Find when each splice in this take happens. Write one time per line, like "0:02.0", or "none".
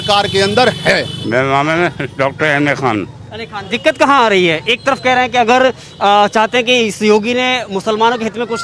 none